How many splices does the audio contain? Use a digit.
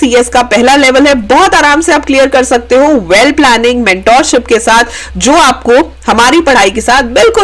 0